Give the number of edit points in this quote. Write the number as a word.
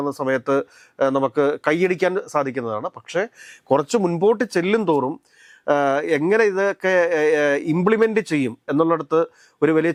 zero